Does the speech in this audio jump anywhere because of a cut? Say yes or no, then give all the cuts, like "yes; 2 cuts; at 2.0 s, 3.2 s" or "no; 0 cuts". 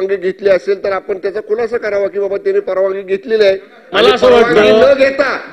no; 0 cuts